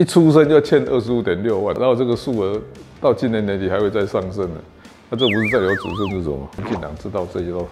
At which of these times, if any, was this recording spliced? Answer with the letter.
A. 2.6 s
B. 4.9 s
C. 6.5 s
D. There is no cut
C